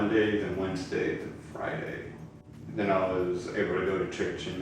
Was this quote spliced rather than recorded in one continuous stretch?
yes; 1 cut; at 2.5 s

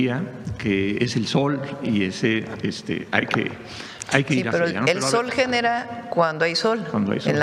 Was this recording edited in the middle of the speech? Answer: no; 0 cuts

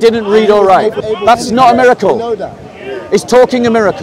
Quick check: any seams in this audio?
yes; 1 cut; at 1.0 s

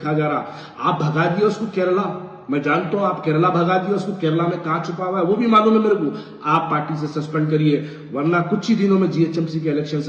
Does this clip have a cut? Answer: no; 0 cuts

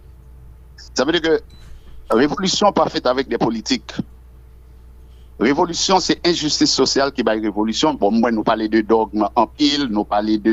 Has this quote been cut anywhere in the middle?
no; 0 cuts

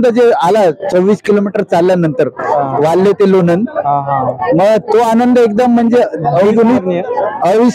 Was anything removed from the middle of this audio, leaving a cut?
no; 0 cuts

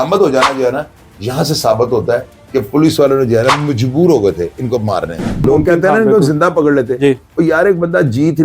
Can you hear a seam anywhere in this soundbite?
yes; 1 cut; at 5.4 s

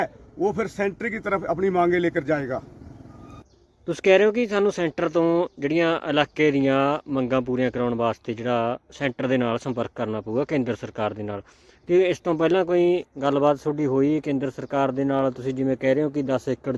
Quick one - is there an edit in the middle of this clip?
no; 0 cuts

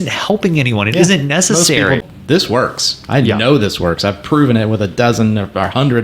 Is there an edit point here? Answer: yes; 1 cut; at 2.0 s

